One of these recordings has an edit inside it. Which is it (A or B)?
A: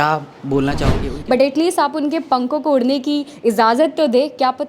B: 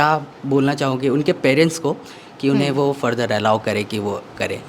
A